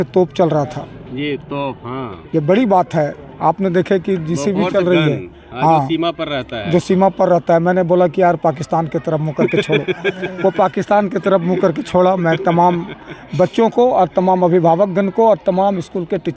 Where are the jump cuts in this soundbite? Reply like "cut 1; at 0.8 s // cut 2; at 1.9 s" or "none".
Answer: none